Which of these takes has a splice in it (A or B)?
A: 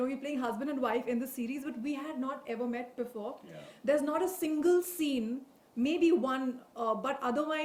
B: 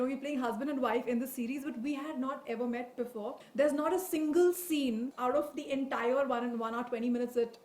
B